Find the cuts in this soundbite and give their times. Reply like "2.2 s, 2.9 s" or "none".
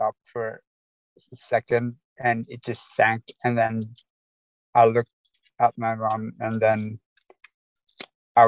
none